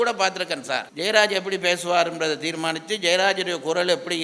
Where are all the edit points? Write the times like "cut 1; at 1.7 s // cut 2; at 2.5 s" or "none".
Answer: cut 1; at 0.9 s

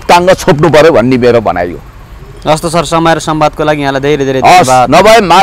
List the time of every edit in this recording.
none

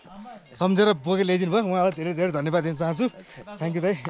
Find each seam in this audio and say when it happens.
none

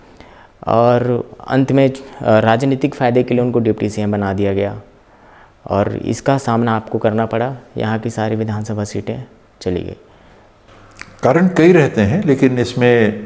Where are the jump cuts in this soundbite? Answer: none

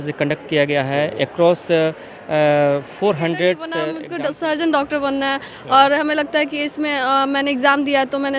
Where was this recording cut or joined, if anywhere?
cut 1; at 4.0 s

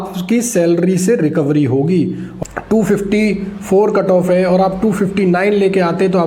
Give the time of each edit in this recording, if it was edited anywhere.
cut 1; at 2.2 s

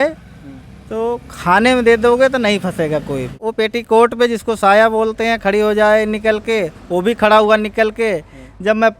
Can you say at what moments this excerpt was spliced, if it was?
cut 1; at 3.4 s

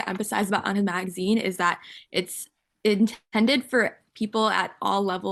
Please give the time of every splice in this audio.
none

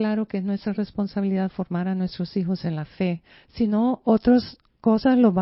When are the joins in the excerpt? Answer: none

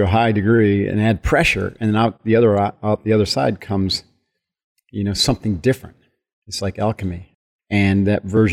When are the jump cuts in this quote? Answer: cut 1; at 7.3 s

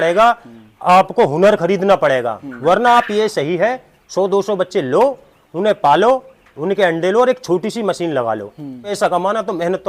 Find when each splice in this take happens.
cut 1; at 2.4 s // cut 2; at 8.9 s

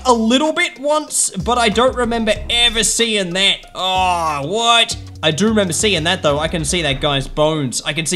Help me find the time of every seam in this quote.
none

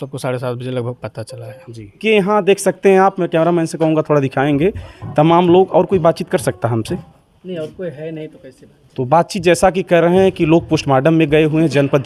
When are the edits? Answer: cut 1; at 2.0 s

